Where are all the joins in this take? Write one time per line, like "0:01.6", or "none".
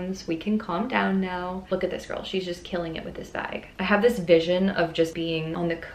0:01.6
0:03.6
0:05.3